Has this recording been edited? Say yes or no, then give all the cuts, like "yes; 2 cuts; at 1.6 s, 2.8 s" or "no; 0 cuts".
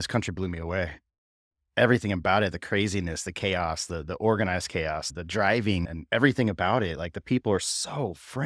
yes; 2 cuts; at 5.1 s, 5.9 s